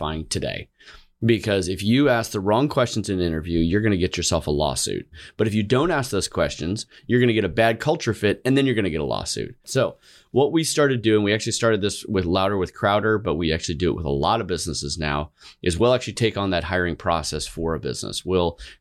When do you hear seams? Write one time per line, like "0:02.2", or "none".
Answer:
0:09.6